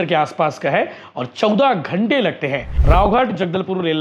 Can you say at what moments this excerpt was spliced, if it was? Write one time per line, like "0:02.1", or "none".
0:02.7